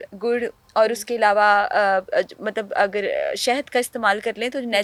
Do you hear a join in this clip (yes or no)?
no